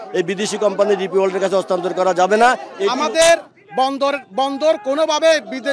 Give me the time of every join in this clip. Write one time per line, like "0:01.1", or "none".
0:02.8